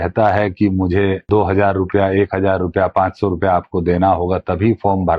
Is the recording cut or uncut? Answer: cut